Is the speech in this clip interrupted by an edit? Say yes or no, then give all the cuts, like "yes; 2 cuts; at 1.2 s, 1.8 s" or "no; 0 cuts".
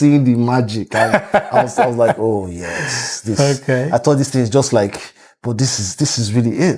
no; 0 cuts